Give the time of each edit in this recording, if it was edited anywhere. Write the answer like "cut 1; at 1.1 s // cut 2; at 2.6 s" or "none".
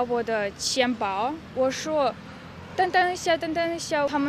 cut 1; at 1.4 s